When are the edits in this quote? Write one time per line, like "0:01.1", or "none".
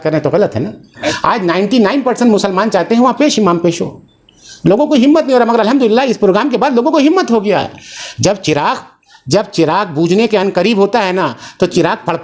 0:01.1